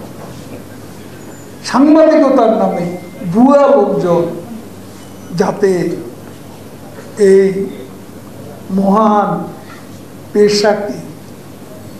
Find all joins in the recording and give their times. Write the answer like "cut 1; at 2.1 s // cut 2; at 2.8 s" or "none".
none